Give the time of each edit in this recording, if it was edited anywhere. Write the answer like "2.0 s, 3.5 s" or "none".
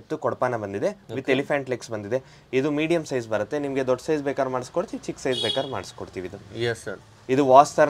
none